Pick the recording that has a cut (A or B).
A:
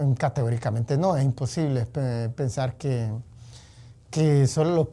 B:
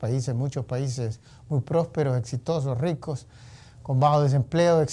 B